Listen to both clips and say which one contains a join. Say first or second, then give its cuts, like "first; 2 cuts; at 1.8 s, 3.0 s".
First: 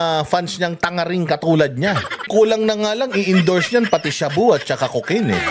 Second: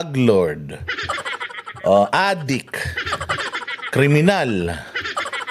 first; 1 cut; at 2.3 s